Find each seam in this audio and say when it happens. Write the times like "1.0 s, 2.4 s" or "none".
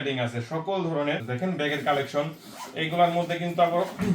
1.3 s